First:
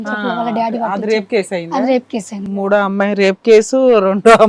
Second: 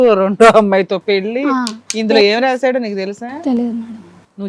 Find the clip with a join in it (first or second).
first